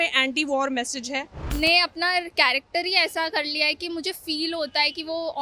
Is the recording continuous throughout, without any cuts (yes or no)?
no